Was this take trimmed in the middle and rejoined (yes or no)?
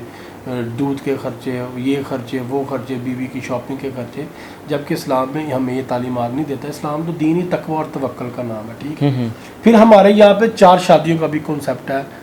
no